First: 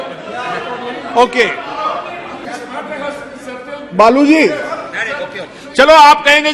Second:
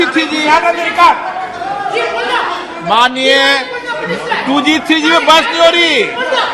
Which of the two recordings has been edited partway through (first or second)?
first